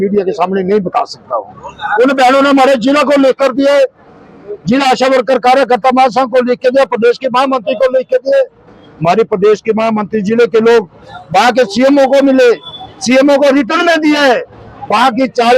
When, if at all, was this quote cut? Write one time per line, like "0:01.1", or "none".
none

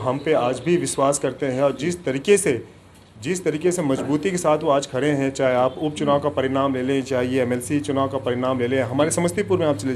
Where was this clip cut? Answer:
none

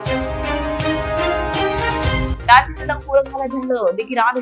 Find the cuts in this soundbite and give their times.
none

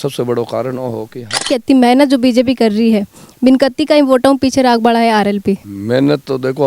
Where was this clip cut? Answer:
0:01.5
0:05.7

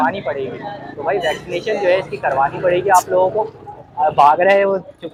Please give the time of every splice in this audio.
none

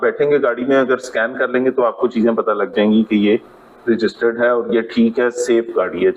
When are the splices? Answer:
none

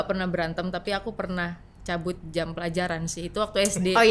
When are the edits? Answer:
none

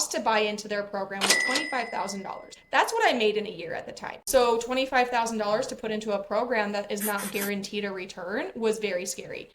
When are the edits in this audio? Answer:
0:04.2

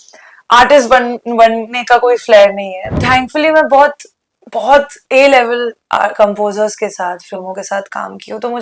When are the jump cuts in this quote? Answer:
0:02.9

